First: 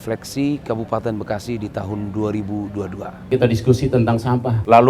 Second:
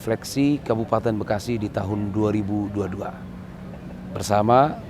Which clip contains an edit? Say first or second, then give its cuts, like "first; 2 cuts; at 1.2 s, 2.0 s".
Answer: first; 1 cut; at 3.3 s